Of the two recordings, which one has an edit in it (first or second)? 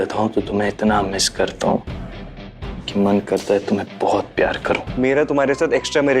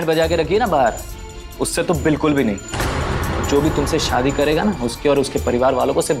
first